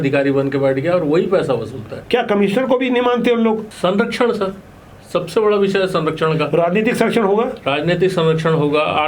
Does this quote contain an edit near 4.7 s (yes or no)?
no